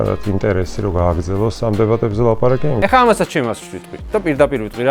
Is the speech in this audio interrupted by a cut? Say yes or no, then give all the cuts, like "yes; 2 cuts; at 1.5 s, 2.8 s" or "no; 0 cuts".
yes; 1 cut; at 2.8 s